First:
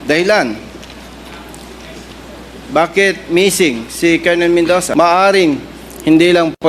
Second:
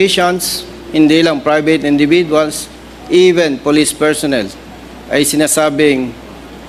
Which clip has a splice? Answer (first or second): first